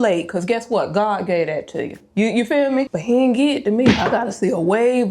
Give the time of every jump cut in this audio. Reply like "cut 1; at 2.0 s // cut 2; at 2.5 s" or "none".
cut 1; at 2.9 s